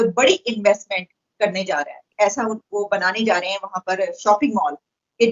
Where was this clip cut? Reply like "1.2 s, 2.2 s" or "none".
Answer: 2.1 s